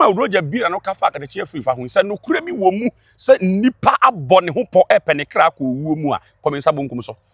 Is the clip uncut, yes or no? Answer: yes